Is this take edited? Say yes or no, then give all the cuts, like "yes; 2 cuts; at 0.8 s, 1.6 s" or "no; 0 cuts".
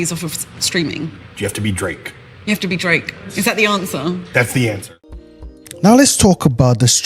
yes; 1 cut; at 4.9 s